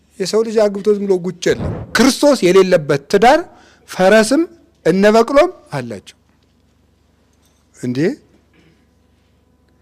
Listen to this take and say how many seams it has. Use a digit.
1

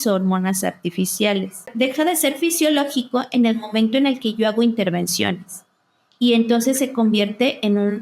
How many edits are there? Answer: 1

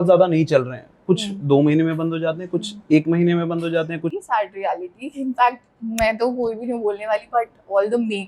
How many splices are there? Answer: 1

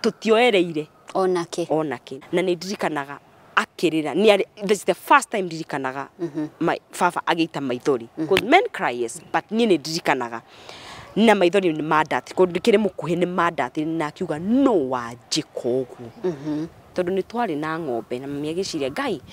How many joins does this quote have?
2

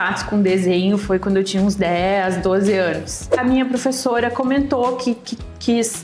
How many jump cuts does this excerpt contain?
1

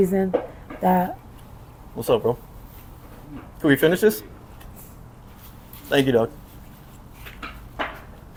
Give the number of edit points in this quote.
0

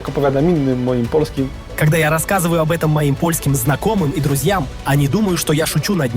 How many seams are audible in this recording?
1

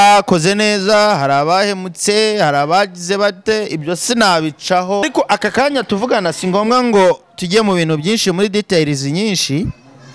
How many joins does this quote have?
1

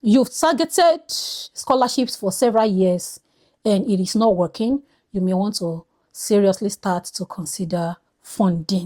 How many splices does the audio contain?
0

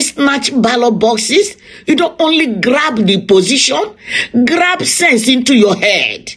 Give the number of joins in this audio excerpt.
0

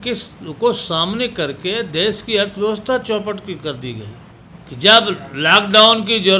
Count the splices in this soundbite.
0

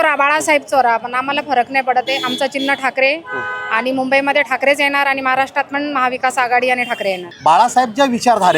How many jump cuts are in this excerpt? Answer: 1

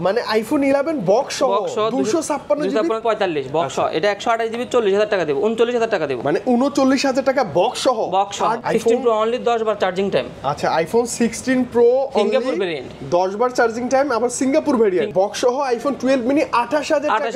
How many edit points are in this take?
3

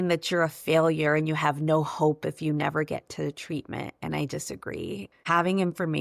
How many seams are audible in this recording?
1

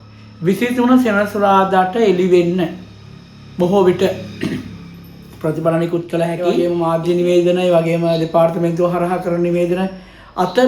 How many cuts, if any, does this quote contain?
1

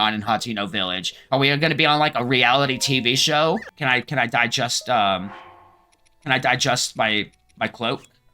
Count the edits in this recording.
1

